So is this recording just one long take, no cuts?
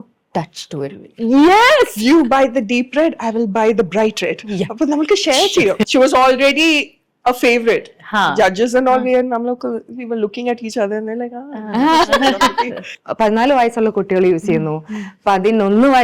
no; 2 cuts; at 5.8 s, 12.9 s

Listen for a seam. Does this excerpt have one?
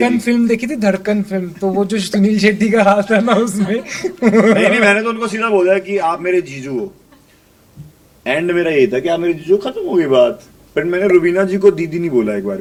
no; 0 cuts

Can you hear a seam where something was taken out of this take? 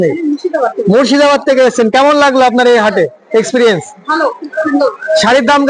no; 0 cuts

